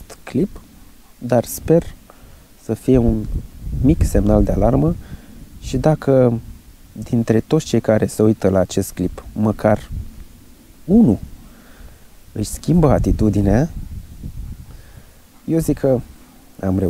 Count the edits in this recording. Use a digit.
0